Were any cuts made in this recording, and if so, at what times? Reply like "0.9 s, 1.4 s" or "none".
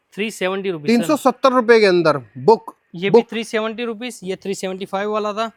none